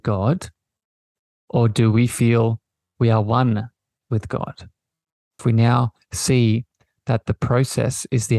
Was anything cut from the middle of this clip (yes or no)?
yes